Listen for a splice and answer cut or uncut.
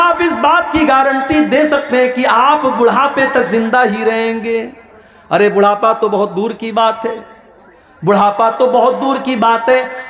uncut